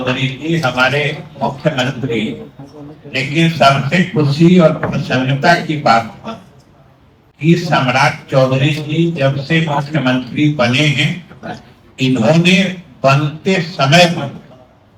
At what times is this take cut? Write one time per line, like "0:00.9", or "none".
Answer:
none